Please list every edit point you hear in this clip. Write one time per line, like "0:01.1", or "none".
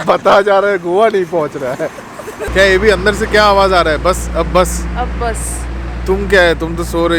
none